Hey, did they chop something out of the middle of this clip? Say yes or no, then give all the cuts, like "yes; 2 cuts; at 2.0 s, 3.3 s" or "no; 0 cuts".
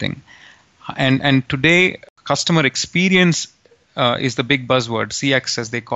yes; 1 cut; at 2.1 s